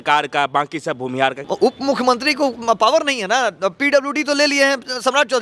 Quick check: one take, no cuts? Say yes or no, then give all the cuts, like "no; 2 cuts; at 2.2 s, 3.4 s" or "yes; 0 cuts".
no; 1 cut; at 1.4 s